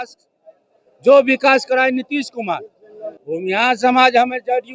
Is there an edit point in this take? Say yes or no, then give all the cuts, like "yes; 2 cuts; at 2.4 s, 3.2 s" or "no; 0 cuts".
yes; 1 cut; at 3.1 s